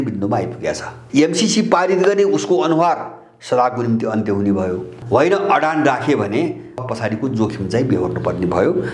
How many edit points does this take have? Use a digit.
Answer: 3